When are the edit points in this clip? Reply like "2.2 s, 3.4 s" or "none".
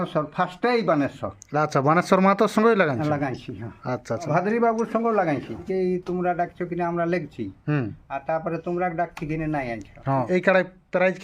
4.3 s, 5.6 s, 10.3 s